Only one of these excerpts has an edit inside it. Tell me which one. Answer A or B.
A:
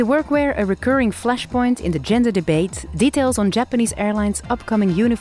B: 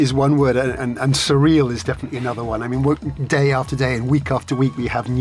A